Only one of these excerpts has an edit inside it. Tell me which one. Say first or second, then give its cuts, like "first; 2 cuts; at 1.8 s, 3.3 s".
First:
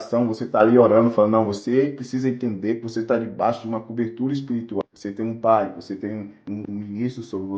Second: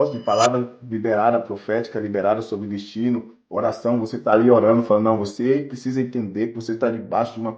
first; 2 cuts; at 4.8 s, 6.6 s